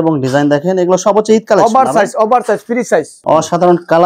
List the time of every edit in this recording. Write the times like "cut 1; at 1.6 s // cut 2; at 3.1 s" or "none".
cut 1; at 3.1 s